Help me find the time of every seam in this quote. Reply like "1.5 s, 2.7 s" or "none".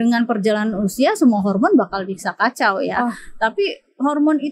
none